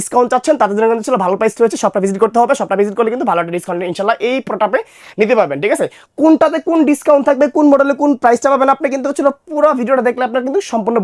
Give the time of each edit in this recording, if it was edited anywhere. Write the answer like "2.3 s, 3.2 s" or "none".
none